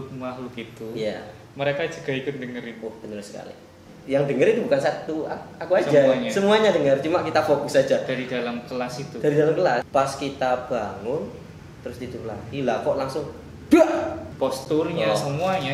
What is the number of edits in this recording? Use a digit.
3